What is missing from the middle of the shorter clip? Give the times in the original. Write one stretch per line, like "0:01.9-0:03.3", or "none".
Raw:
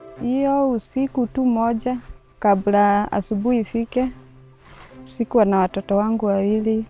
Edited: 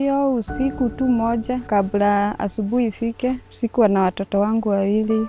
0:02.0-0:02.4
0:04.2-0:05.0